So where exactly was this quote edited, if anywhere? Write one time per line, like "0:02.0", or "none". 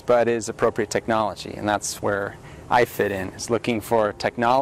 none